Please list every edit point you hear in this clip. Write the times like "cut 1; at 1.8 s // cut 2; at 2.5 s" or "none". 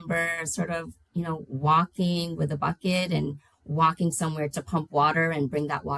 none

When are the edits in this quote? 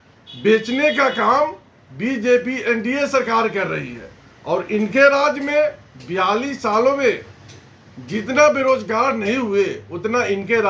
none

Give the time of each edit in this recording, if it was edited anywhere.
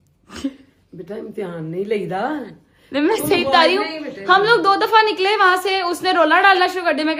none

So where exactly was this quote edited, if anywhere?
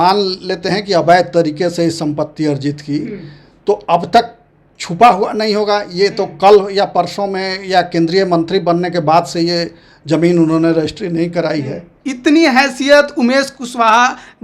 cut 1; at 12.0 s

